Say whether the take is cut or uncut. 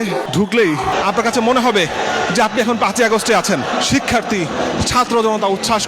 cut